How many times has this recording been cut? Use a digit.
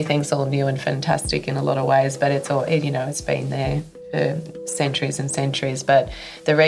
0